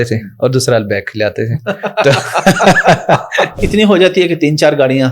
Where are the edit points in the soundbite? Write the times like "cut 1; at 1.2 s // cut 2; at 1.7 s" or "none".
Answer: cut 1; at 3.6 s